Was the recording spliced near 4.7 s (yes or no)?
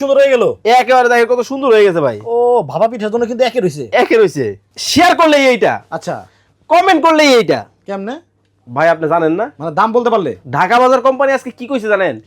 yes